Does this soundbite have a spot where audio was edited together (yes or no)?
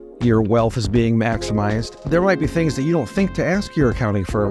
no